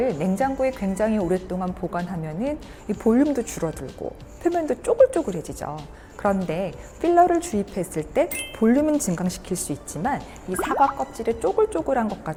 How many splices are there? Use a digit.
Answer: 0